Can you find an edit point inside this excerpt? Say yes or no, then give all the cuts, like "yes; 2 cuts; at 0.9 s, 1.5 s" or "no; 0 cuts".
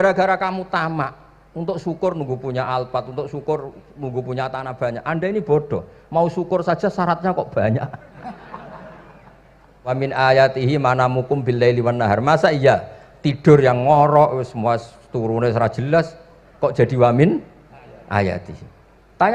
yes; 1 cut; at 10.0 s